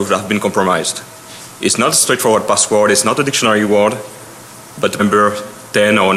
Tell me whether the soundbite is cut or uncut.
uncut